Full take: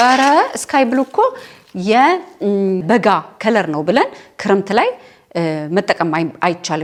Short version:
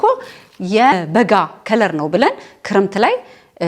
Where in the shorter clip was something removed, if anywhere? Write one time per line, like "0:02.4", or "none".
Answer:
0:01.0